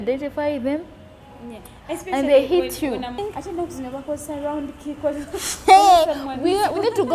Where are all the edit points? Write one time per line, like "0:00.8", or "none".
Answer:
0:03.2